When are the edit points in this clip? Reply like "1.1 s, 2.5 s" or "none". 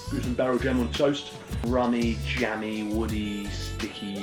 none